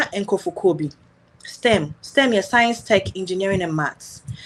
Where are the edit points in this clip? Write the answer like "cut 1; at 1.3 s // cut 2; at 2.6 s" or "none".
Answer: none